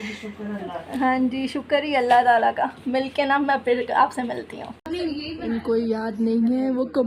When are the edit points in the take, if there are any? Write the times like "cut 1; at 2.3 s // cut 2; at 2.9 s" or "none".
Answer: cut 1; at 4.9 s